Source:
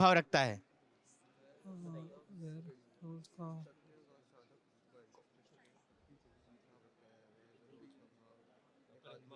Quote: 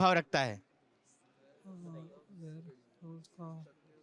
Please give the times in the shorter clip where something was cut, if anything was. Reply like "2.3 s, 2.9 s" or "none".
none